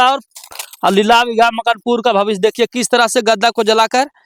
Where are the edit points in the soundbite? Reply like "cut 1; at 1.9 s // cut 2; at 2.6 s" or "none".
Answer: none